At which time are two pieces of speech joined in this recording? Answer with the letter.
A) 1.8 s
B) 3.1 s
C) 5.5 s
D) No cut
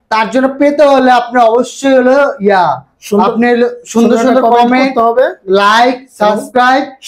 D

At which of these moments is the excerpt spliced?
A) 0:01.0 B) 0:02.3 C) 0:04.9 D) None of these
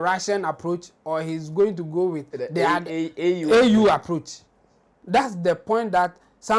C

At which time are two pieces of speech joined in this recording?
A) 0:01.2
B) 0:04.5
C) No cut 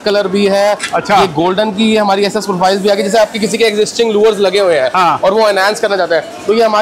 C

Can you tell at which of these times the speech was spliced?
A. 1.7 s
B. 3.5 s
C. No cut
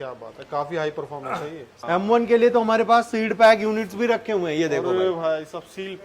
A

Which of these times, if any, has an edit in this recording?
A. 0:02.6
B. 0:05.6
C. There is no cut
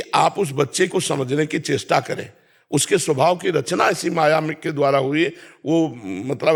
C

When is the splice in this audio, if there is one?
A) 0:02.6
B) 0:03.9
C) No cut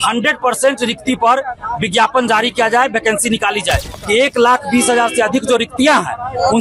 B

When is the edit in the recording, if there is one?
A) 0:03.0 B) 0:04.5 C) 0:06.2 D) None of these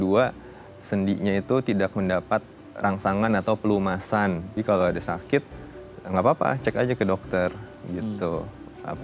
B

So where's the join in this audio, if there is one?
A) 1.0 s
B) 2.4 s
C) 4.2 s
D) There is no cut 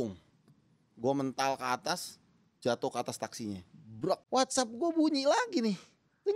C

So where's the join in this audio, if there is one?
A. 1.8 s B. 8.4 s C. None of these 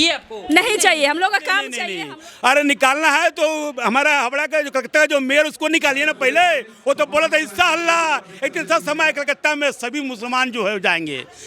A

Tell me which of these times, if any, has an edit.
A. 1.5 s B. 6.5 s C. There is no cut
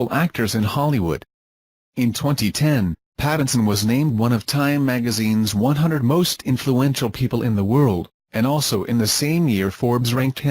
B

